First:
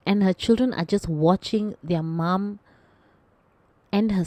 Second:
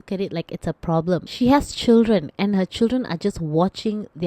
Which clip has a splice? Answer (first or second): second